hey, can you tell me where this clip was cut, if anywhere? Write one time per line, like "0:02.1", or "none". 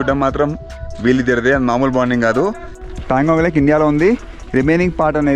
0:02.8

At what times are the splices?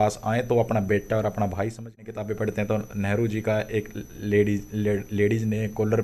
0:02.0

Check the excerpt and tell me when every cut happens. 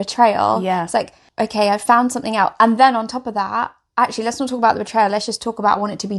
0:01.2

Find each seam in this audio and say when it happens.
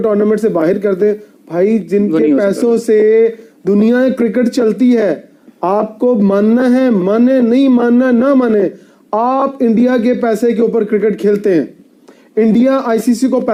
none

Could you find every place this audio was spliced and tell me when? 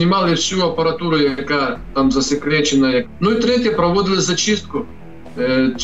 0:03.1

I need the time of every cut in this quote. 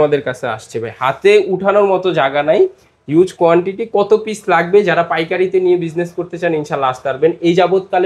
none

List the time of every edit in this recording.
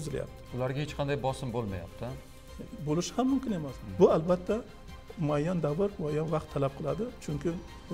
0:03.7

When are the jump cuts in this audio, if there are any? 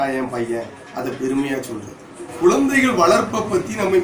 0:02.3

